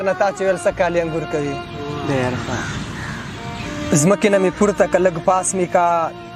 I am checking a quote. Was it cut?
no; 0 cuts

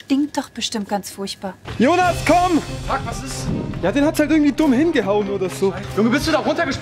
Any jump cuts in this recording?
yes; 2 cuts; at 1.6 s, 5.8 s

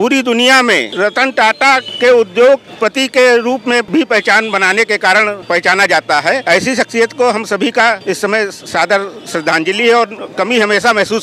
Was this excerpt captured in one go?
no; 7 cuts; at 0.9 s, 1.9 s, 2.7 s, 3.9 s, 5.4 s, 6.4 s, 8.0 s

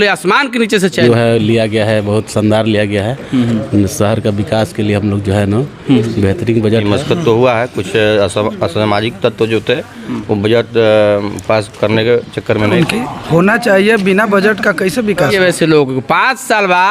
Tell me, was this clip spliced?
yes; 4 cuts; at 1.0 s, 6.8 s, 12.7 s, 15.3 s

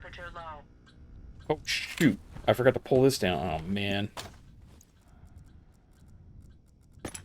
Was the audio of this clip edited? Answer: no; 0 cuts

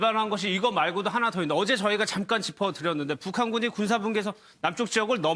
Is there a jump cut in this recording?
yes; 1 cut; at 1.4 s

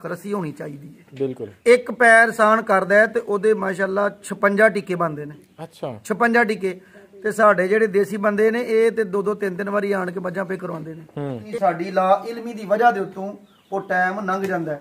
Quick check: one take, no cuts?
no; 2 cuts; at 1.5 s, 11.4 s

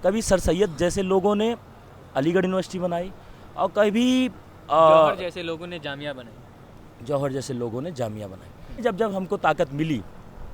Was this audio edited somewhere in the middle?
yes; 1 cut; at 8.8 s

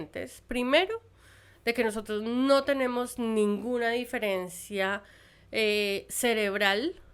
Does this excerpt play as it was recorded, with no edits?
yes; 0 cuts

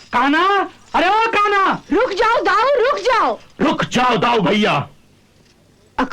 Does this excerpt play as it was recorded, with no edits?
yes; 0 cuts

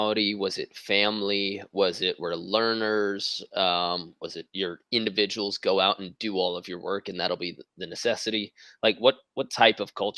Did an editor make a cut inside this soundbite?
no; 0 cuts

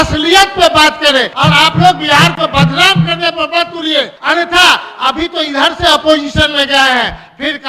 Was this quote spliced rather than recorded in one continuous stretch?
yes; 2 cuts; at 1.3 s, 4.2 s

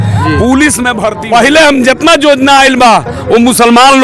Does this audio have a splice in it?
yes; 1 cut; at 1.1 s

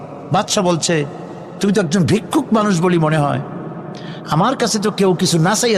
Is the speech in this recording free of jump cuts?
yes; 0 cuts

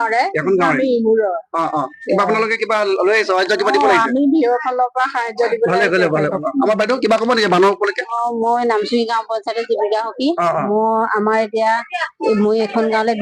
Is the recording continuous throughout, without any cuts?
no; 1 cut; at 6.4 s

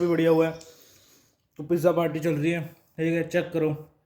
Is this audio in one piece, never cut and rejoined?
yes; 0 cuts

